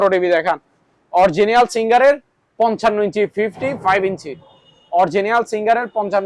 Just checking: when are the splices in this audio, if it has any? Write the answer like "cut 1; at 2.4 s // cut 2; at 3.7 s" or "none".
none